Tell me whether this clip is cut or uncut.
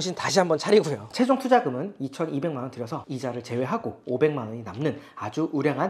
cut